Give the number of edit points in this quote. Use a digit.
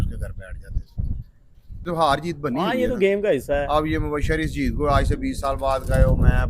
1